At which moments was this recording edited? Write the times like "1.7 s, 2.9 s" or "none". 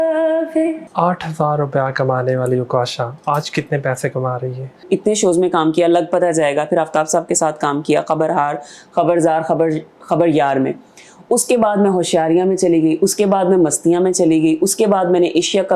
0.8 s, 4.8 s